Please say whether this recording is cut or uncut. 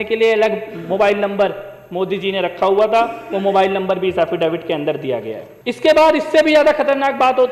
cut